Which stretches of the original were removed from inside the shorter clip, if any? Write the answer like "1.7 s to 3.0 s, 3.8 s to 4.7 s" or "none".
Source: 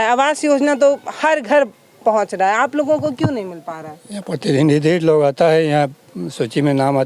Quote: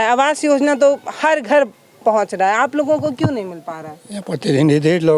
none